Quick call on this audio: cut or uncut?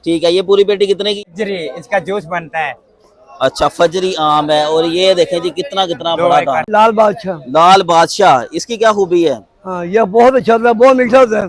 cut